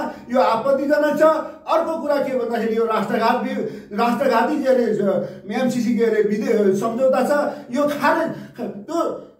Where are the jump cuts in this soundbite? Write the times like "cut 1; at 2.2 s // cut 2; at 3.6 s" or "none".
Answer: none

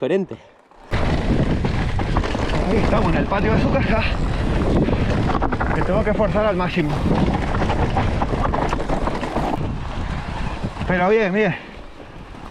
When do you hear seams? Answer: cut 1; at 0.9 s // cut 2; at 9.6 s

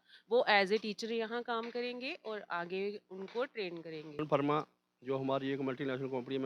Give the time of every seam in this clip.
cut 1; at 4.2 s

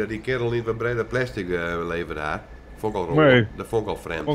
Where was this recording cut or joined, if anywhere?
none

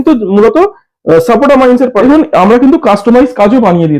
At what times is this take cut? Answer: cut 1; at 2.0 s

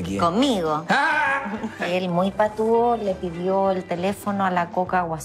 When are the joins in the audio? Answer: cut 1; at 1.8 s

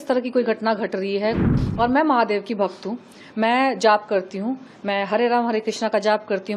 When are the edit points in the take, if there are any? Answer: cut 1; at 1.5 s

